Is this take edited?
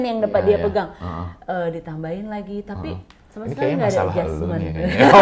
no; 0 cuts

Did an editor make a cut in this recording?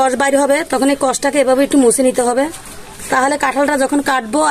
no; 0 cuts

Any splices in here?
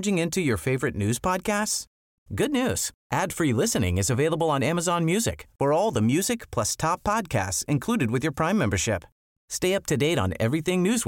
no; 0 cuts

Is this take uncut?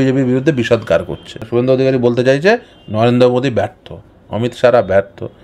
no; 1 cut; at 1.4 s

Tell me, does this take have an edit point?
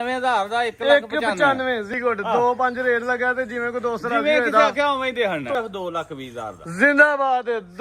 yes; 2 cuts; at 1.9 s, 5.5 s

